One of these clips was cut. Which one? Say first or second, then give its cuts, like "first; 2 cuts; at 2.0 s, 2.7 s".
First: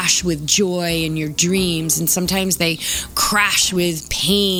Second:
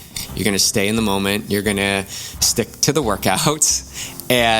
second; 1 cut; at 2.4 s